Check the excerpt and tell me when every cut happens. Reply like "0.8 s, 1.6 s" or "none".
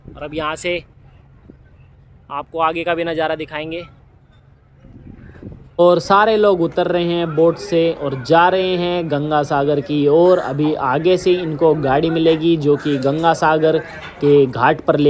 none